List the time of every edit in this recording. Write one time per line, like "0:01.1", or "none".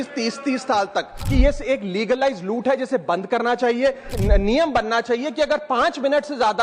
0:01.2
0:04.1